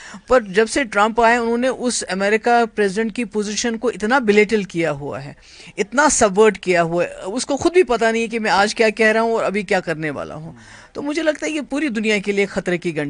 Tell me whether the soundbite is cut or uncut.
uncut